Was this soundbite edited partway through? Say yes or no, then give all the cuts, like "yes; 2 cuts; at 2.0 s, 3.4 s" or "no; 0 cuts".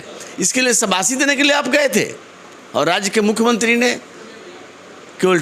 no; 0 cuts